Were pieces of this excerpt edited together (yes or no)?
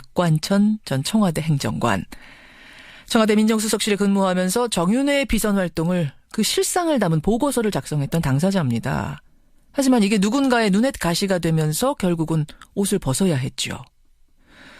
yes